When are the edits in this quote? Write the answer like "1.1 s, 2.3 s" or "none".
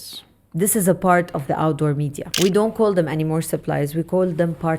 2.3 s